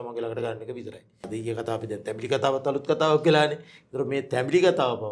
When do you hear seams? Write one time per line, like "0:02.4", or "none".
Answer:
0:01.3